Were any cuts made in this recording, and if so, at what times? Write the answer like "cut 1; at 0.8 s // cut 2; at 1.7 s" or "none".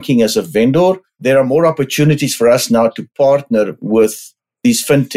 cut 1; at 1.1 s